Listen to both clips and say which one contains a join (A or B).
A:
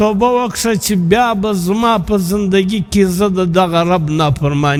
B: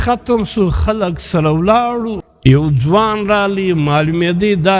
B